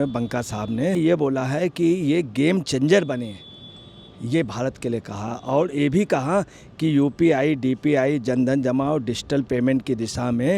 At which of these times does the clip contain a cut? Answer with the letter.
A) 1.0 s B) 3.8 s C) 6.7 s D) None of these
A